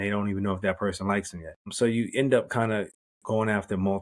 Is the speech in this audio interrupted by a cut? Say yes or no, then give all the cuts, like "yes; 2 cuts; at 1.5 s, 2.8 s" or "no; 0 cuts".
yes; 1 cut; at 1.7 s